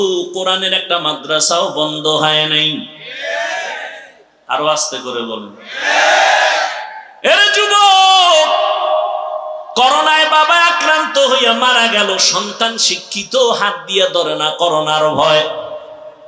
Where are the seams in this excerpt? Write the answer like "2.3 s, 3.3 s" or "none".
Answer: none